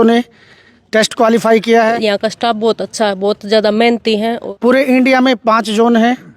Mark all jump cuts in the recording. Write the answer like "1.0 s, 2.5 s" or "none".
2.0 s, 4.4 s